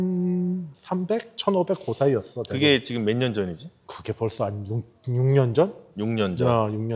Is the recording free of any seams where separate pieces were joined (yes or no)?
yes